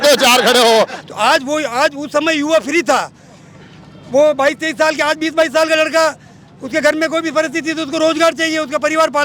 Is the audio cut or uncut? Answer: cut